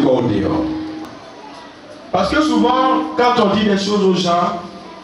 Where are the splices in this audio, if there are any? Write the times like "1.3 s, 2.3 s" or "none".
1.1 s